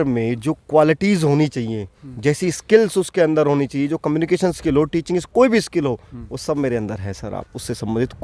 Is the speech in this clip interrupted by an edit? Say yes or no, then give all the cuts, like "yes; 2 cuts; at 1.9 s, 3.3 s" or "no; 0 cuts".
no; 0 cuts